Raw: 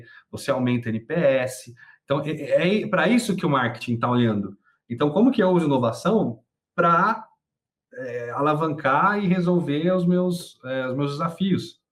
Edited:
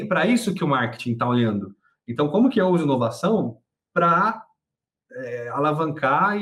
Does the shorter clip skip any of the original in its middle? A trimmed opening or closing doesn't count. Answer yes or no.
no